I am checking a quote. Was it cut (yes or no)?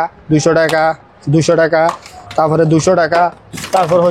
no